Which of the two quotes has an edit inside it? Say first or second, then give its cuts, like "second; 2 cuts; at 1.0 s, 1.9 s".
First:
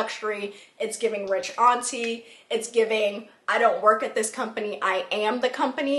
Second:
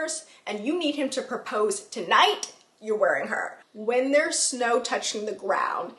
second; 1 cut; at 3.6 s